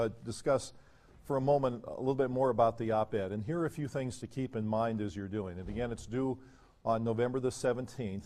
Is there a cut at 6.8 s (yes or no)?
no